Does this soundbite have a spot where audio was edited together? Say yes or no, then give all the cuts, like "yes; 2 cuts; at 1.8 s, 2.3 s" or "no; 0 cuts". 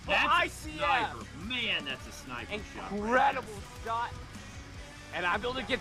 no; 0 cuts